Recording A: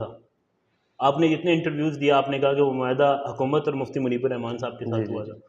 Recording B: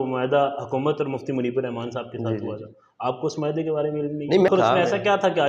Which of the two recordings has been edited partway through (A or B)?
B